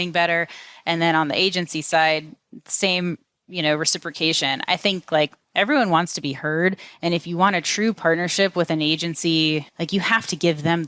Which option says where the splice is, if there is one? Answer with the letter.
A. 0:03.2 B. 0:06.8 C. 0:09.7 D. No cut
C